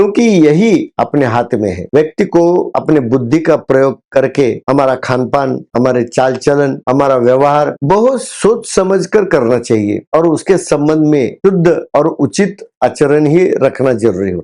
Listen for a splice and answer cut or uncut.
cut